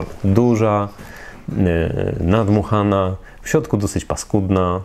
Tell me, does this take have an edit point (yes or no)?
no